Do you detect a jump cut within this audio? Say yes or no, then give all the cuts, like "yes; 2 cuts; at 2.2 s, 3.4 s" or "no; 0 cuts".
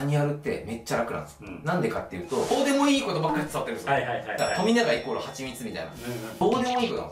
yes; 2 cuts; at 2.5 s, 6.3 s